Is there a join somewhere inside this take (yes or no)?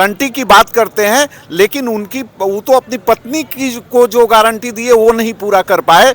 no